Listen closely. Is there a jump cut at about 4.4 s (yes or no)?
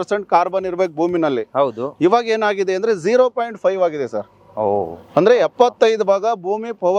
no